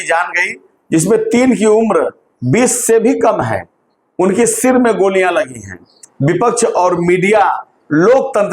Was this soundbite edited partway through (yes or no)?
yes